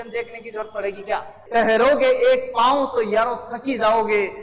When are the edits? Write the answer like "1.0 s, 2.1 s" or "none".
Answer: 1.4 s